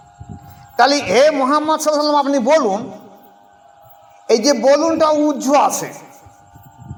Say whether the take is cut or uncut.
uncut